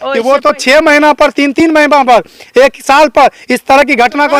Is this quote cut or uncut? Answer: uncut